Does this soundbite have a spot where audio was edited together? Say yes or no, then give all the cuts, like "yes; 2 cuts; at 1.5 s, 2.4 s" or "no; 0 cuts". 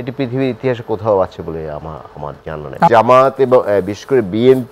yes; 1 cut; at 2.9 s